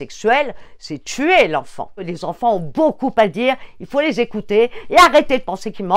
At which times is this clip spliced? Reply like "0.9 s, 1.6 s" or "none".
2.1 s